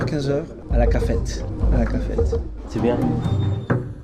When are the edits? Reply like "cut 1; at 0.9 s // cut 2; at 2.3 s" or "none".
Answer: cut 1; at 2.5 s